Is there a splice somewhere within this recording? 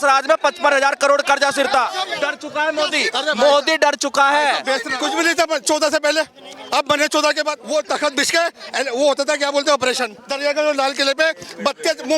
yes; 4 cuts; at 2.2 s, 4.9 s, 7.6 s, 10.2 s

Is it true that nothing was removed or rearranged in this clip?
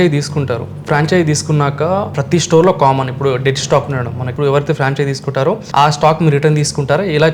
no; 3 cuts; at 2.2 s, 4.3 s, 5.6 s

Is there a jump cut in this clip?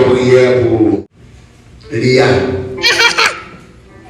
yes; 1 cut; at 1.1 s

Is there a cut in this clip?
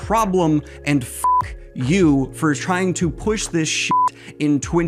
no; 0 cuts

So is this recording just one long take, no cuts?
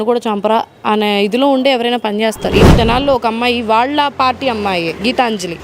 no; 1 cut; at 2.7 s

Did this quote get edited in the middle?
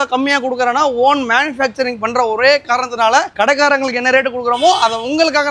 no; 0 cuts

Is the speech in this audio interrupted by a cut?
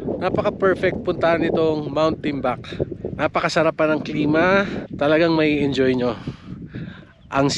yes; 2 cuts; at 3.0 s, 4.8 s

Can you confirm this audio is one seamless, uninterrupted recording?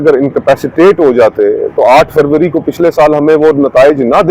yes; 0 cuts

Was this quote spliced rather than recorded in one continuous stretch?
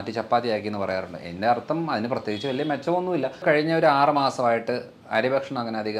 yes; 1 cut; at 3.4 s

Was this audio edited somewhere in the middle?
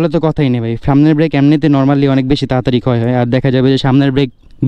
no; 0 cuts

